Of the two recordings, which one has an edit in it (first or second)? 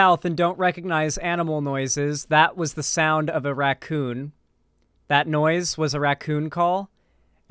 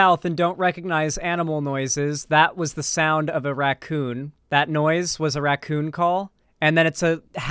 second